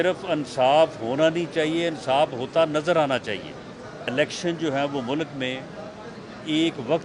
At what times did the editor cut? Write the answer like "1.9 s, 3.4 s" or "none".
4.1 s